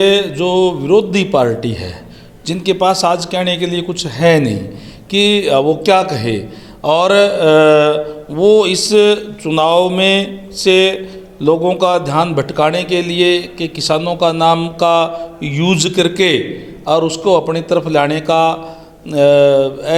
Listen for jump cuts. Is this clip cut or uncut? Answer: uncut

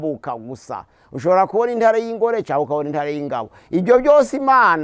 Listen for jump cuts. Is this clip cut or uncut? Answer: uncut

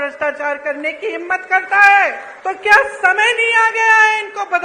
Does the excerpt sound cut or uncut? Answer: cut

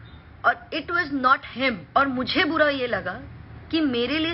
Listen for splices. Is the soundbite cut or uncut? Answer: cut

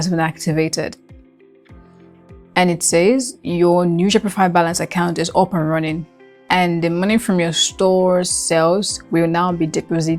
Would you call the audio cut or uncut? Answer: uncut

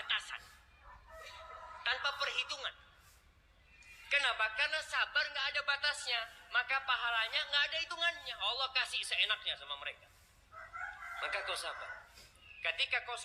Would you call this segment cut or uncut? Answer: uncut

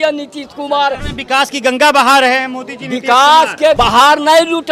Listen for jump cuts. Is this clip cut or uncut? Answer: cut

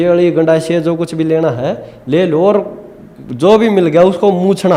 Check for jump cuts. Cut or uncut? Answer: uncut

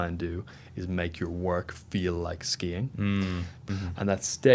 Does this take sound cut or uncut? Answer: cut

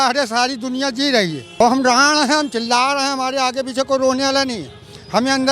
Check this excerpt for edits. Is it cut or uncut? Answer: cut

